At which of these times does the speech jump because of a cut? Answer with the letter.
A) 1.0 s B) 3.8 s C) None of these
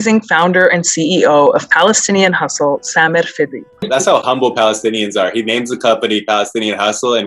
B